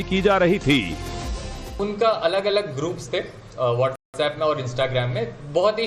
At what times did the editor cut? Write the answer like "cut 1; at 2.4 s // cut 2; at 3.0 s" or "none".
none